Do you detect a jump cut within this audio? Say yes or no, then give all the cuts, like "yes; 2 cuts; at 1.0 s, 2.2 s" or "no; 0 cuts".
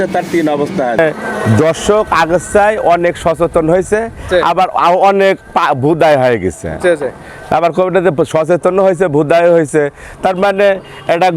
yes; 1 cut; at 1.0 s